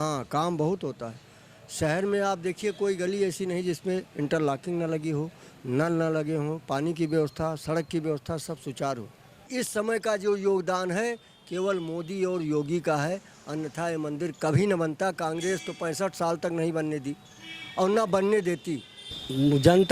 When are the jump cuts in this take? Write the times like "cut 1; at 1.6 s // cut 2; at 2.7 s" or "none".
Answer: cut 1; at 9.5 s // cut 2; at 19.1 s

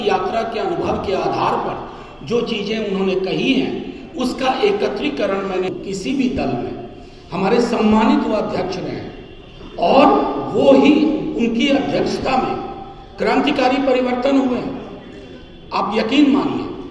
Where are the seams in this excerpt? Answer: cut 1; at 5.7 s

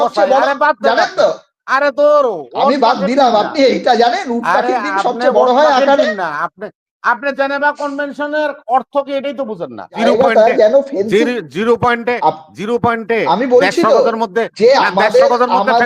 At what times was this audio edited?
cut 1; at 10.0 s

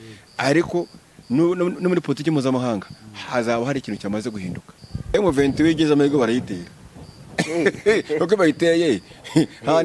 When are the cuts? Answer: cut 1; at 5.1 s

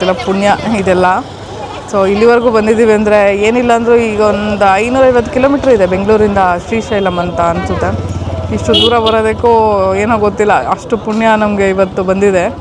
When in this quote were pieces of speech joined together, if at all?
none

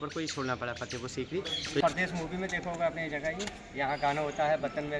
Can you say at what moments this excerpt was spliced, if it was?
cut 1; at 1.8 s

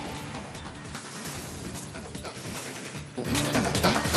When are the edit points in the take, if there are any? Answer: none

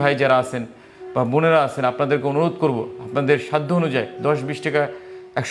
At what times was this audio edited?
none

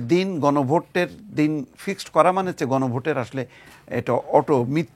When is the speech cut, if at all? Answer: none

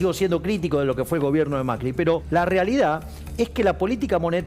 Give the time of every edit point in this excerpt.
cut 1; at 2.2 s

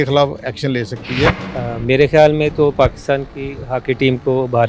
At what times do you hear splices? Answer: cut 1; at 1.5 s

